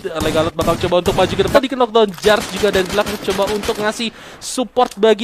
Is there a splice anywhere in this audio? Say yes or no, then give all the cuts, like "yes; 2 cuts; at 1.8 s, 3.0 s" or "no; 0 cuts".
yes; 1 cut; at 1.5 s